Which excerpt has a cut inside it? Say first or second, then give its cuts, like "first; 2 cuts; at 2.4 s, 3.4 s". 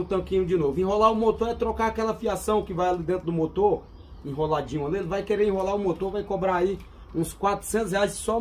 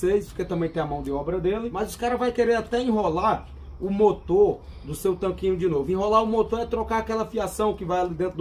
second; 1 cut; at 1.7 s